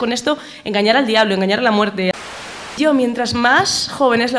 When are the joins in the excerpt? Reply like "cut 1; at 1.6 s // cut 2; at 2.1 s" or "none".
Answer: cut 1; at 2.3 s